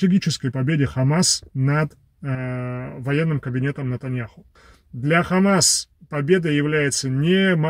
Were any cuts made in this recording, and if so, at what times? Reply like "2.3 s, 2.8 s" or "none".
4.4 s